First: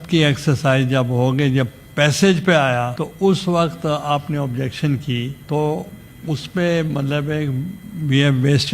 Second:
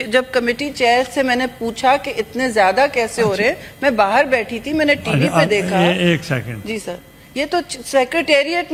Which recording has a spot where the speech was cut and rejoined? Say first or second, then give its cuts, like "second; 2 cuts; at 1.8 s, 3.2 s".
first; 2 cuts; at 3.0 s, 5.4 s